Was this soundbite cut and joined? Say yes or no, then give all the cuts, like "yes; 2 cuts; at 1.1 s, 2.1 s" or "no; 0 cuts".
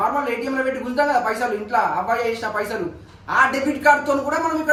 no; 0 cuts